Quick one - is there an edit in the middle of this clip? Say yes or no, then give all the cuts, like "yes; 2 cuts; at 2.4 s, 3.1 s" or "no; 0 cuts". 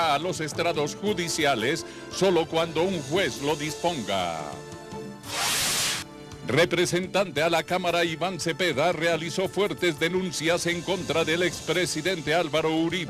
yes; 1 cut; at 0.9 s